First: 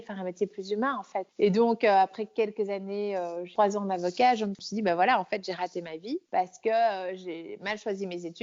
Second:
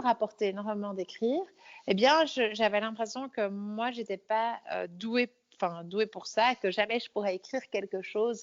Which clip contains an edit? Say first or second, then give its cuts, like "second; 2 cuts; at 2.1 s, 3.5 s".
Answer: first; 4 cuts; at 1.3 s, 3.5 s, 4.6 s, 6.2 s